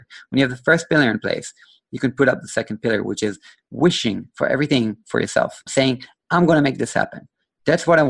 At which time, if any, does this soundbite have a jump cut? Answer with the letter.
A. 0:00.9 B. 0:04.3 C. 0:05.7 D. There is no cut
C